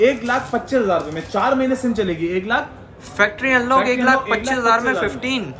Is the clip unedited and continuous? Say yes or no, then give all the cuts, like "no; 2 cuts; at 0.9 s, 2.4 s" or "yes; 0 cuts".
yes; 0 cuts